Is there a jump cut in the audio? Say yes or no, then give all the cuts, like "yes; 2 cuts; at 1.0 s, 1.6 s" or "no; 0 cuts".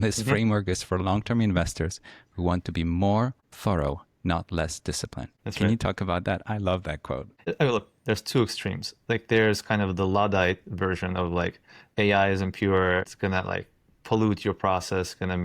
yes; 5 cuts; at 3.5 s, 5.4 s, 7.5 s, 11.8 s, 13.1 s